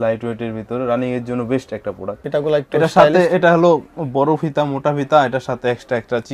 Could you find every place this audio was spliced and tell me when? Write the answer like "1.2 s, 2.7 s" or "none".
2.1 s